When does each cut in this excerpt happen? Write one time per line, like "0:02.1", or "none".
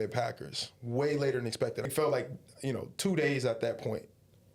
0:01.9